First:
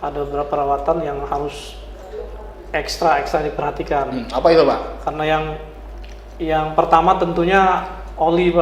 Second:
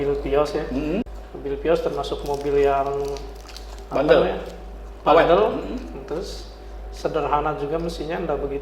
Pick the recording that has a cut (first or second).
second